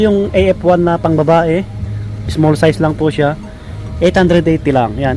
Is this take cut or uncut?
uncut